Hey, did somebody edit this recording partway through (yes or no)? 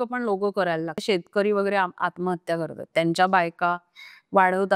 yes